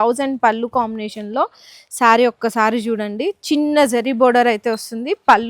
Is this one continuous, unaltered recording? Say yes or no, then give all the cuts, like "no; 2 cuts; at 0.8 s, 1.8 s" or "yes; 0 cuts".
yes; 0 cuts